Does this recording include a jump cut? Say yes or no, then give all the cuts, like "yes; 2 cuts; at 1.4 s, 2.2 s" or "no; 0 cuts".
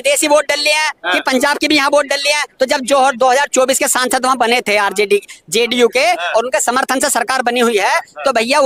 no; 0 cuts